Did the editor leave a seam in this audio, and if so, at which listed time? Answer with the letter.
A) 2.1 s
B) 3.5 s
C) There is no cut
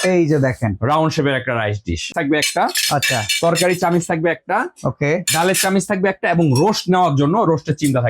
A